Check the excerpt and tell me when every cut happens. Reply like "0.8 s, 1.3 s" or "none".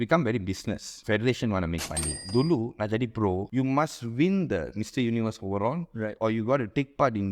0.9 s, 2.2 s, 3.5 s